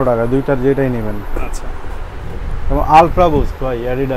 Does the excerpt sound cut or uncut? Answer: uncut